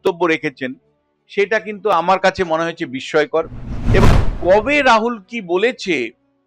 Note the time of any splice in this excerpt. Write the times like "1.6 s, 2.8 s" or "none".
4.0 s